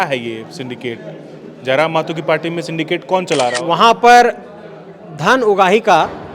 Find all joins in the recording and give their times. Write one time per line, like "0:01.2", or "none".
0:03.6